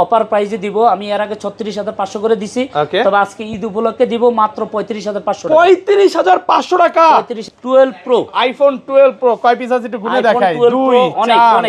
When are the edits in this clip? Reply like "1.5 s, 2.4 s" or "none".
7.4 s

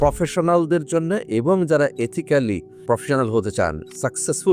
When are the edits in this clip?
none

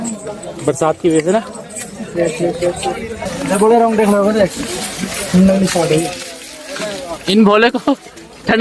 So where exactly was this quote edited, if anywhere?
3.3 s

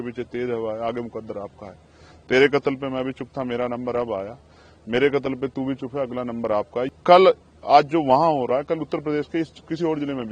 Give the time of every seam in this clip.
6.9 s

